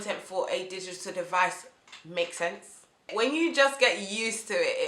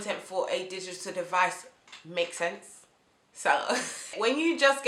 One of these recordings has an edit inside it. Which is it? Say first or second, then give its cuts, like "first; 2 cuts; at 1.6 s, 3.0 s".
first; 1 cut; at 2.9 s